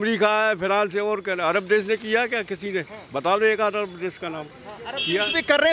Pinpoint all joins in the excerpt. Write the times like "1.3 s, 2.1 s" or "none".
none